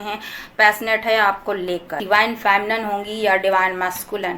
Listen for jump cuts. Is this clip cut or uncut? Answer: cut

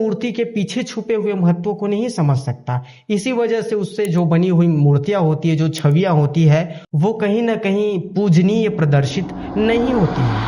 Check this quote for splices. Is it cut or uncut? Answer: uncut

